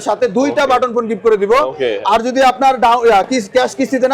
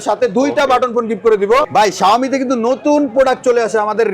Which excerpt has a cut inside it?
second; 1 cut; at 1.7 s

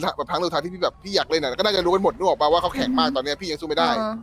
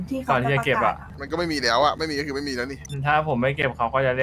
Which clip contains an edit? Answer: second; 2 cuts; at 1.1 s, 2.8 s

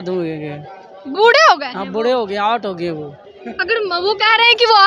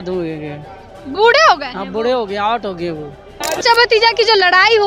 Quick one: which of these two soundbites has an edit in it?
second; 1 cut; at 3.4 s

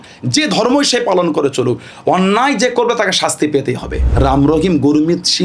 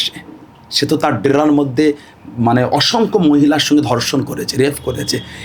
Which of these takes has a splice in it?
first; 1 cut; at 4.0 s

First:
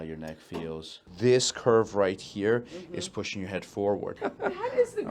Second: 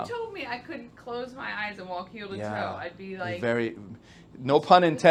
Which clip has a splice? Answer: first; 2 cuts; at 1.1 s, 4.2 s

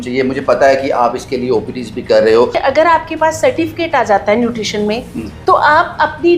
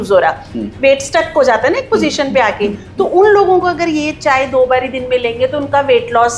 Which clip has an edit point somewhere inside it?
first; 1 cut; at 2.6 s

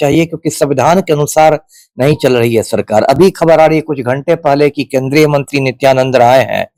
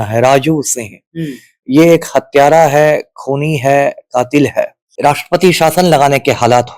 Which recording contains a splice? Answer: second; 1 cut; at 4.8 s

